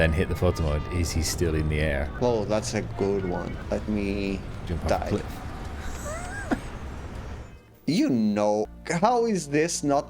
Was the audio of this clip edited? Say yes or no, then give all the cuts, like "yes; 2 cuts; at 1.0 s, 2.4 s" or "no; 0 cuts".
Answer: yes; 3 cuts; at 2.1 s, 3.6 s, 8.7 s